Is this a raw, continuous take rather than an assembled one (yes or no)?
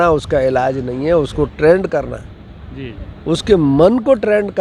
yes